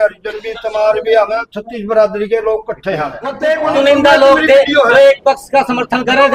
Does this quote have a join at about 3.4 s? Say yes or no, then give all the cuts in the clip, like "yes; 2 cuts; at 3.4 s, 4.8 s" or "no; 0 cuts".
yes; 1 cut; at 3.4 s